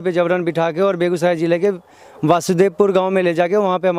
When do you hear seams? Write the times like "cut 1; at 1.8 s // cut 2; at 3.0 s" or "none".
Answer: none

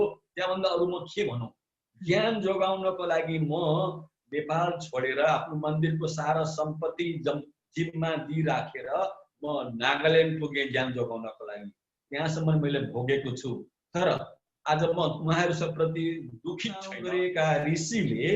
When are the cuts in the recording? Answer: cut 1; at 17.0 s

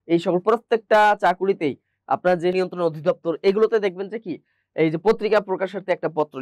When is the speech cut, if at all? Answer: cut 1; at 2.5 s

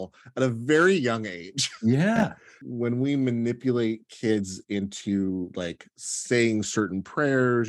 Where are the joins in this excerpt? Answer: cut 1; at 2.7 s

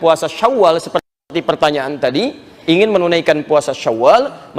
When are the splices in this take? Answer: cut 1; at 1.2 s

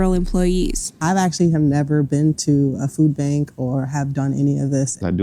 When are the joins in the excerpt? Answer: none

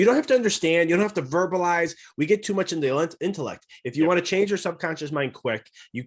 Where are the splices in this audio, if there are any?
none

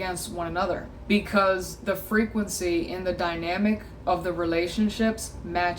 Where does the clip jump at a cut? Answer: cut 1; at 0.9 s

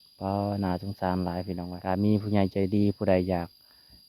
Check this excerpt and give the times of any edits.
cut 1; at 1.7 s

